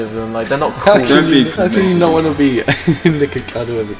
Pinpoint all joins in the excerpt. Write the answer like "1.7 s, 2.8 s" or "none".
1.5 s